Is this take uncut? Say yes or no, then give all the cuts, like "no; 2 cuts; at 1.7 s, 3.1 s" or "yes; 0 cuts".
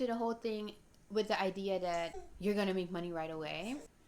no; 1 cut; at 2.2 s